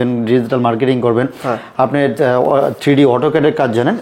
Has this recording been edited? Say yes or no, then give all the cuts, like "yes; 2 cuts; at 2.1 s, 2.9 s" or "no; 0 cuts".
no; 0 cuts